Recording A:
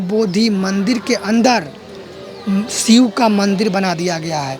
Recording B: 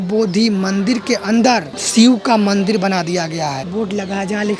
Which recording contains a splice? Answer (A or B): B